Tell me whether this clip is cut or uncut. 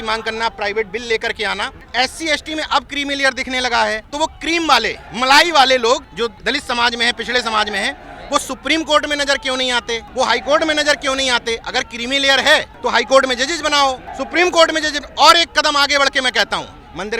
cut